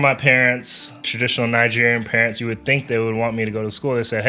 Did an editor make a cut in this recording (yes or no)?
yes